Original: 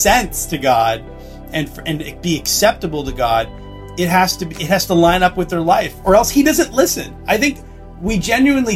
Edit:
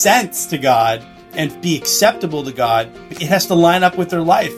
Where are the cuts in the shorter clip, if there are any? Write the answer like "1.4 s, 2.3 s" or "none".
1.5 s, 3.1 s